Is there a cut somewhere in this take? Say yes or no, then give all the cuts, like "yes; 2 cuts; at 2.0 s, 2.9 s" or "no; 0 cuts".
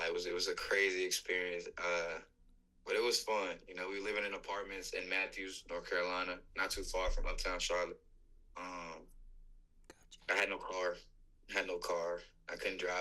no; 0 cuts